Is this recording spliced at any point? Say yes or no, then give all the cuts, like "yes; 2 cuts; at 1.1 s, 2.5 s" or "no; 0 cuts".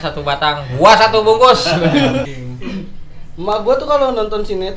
yes; 1 cut; at 2.3 s